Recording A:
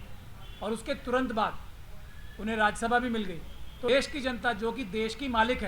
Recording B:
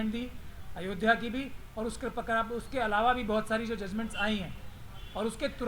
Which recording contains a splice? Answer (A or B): A